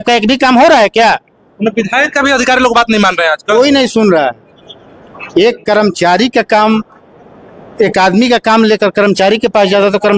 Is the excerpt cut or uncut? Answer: uncut